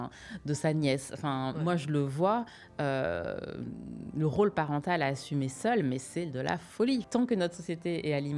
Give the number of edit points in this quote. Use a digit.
1